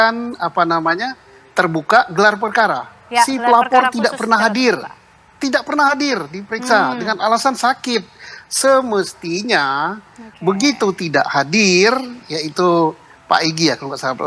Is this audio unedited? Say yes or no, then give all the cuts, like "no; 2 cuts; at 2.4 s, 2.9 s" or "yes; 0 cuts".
yes; 0 cuts